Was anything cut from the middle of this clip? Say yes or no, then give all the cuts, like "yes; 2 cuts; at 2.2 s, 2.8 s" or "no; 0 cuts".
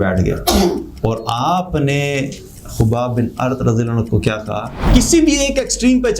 yes; 1 cut; at 4.7 s